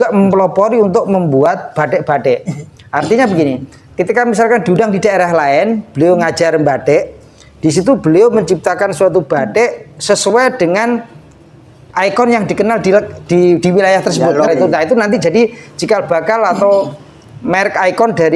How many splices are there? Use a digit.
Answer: 1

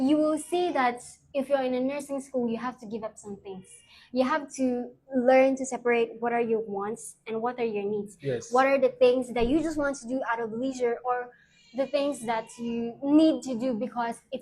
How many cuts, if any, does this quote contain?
0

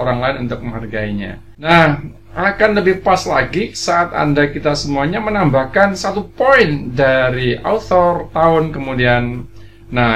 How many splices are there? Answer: 1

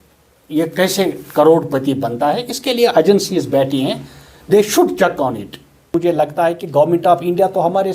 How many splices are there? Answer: 1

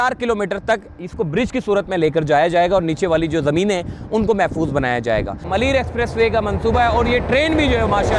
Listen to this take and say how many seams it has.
1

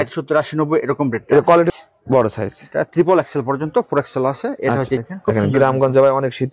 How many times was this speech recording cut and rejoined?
2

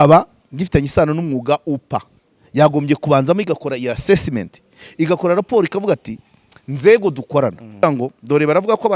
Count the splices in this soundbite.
1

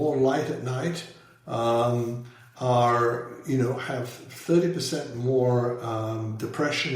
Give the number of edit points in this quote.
0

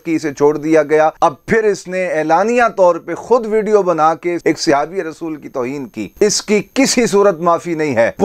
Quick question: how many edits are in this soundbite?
2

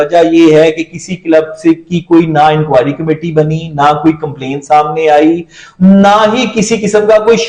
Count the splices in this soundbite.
0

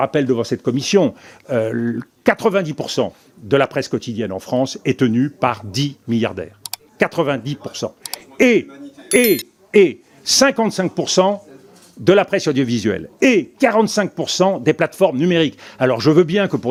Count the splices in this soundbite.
0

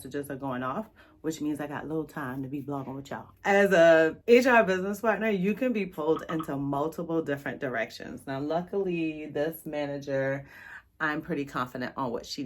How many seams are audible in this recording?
1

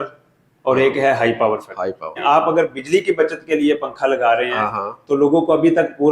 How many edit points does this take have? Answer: 1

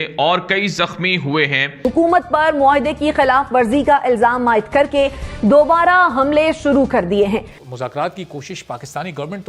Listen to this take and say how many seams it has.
2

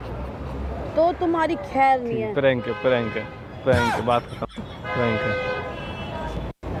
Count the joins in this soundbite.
0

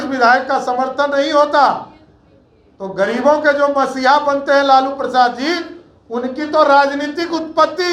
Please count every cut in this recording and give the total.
0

